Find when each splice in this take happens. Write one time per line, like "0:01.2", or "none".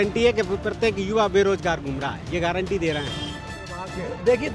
0:03.6